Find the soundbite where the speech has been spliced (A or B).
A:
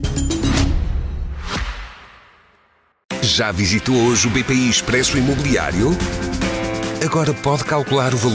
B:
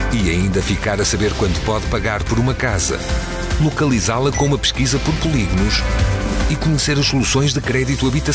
A